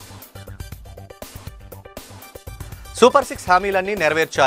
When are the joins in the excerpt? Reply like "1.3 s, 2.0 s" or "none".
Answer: 2.8 s